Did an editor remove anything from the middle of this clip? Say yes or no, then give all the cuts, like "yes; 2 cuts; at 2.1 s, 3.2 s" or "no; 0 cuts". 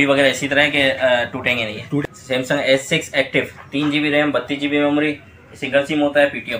yes; 1 cut; at 2.0 s